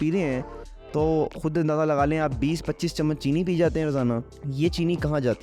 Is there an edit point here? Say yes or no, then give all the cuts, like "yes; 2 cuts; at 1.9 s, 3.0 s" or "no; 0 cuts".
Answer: yes; 1 cut; at 4.4 s